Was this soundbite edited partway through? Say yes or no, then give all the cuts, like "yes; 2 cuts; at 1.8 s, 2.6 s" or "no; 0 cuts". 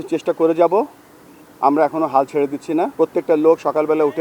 yes; 1 cut; at 2.9 s